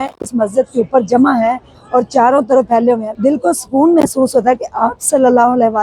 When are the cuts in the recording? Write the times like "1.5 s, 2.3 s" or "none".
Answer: 3.1 s